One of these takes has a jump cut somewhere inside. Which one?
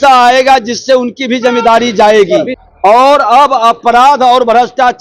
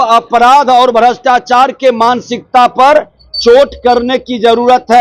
first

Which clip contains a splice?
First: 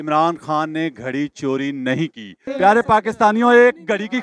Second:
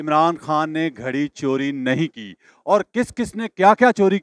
first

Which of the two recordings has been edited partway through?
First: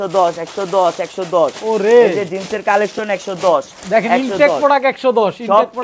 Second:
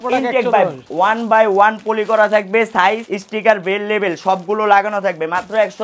second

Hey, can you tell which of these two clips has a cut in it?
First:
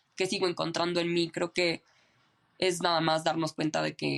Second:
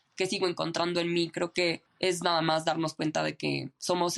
second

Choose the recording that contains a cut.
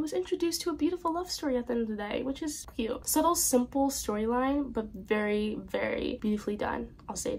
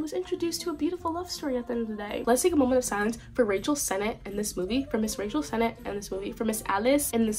second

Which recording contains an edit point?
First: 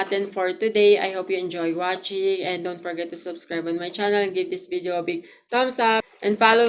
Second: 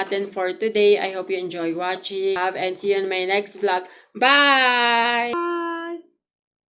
second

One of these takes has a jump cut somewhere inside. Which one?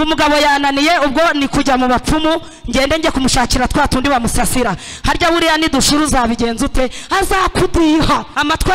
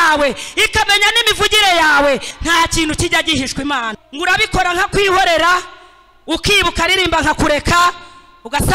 second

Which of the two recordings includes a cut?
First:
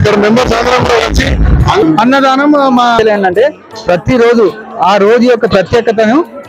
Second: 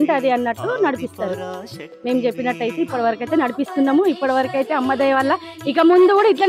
first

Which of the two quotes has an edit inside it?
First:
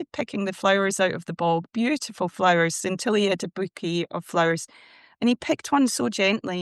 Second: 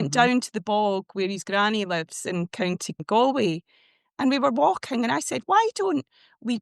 second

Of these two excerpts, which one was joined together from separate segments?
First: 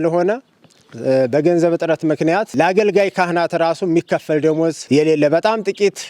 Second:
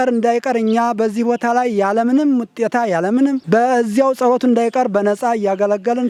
first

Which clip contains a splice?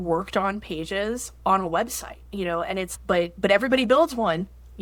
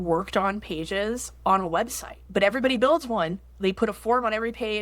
second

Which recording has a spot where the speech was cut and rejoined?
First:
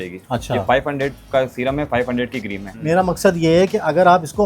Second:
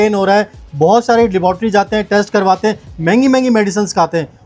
first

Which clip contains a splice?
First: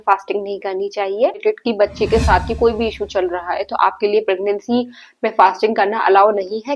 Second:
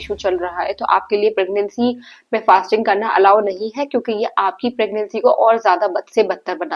first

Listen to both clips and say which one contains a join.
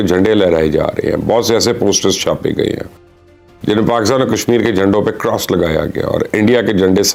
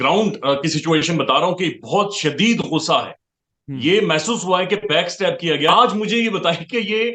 second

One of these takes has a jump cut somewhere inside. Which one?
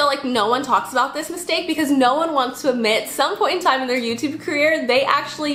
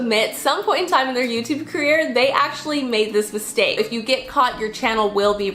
second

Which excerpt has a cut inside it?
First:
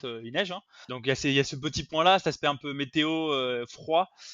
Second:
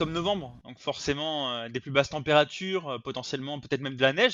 first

